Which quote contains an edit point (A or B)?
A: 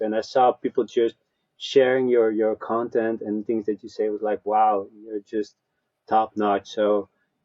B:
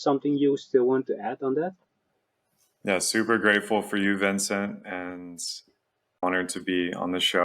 B